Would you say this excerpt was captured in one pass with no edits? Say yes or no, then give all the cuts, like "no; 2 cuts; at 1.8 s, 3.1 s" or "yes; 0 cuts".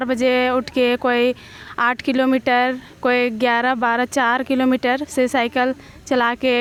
yes; 0 cuts